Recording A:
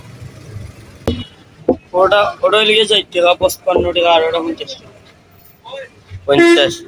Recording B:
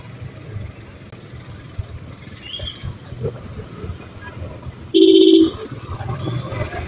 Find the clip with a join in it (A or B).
A